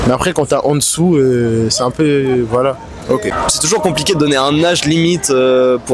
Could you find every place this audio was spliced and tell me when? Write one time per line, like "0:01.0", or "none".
0:03.3